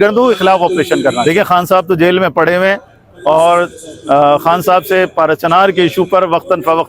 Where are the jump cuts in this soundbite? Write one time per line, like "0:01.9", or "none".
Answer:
0:01.2